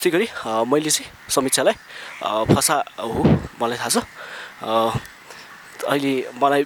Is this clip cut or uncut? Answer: uncut